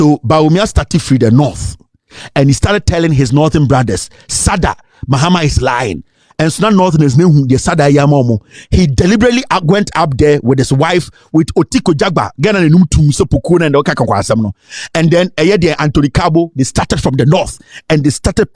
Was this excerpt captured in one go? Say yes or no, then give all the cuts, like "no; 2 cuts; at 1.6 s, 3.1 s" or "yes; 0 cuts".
yes; 0 cuts